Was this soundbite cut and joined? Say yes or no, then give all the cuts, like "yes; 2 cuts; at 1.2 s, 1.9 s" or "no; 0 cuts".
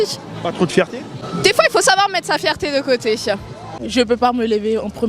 yes; 2 cuts; at 1.2 s, 3.9 s